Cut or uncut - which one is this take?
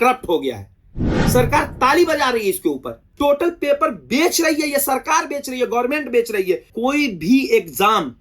cut